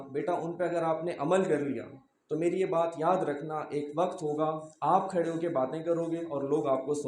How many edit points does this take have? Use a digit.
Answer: 0